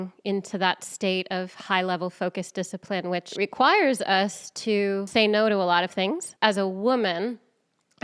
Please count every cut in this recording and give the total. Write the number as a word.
three